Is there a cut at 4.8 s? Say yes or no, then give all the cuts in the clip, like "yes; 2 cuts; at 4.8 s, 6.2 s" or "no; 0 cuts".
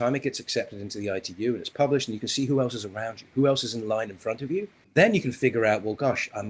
yes; 1 cut; at 4.8 s